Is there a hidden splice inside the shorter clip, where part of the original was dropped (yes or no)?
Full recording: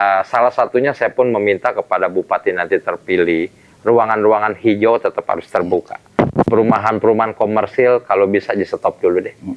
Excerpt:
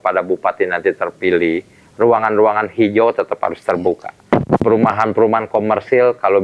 no